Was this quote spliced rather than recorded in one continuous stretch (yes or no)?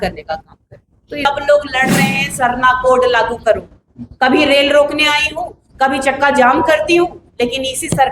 yes